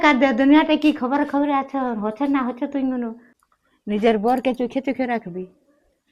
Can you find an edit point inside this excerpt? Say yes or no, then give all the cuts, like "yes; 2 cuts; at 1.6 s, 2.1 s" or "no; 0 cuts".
yes; 1 cut; at 3.3 s